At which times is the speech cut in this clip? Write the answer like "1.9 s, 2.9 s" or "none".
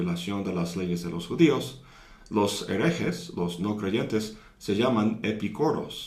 1.4 s